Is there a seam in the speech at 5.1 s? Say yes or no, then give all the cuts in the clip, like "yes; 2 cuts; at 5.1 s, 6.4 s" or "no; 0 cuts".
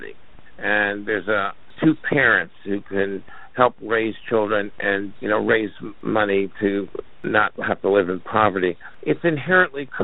yes; 5 cuts; at 1.7 s, 5.1 s, 5.9 s, 7.2 s, 8.9 s